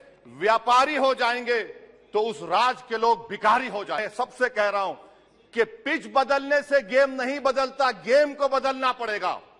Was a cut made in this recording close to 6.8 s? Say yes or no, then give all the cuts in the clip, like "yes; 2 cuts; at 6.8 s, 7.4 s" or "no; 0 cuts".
no; 1 cut; at 4.1 s